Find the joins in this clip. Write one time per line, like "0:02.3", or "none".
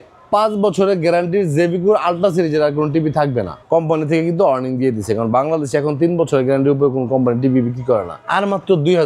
0:03.6
0:08.2